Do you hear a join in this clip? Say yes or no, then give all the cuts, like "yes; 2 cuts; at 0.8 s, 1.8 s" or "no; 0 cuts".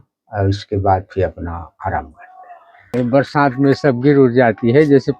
yes; 1 cut; at 2.9 s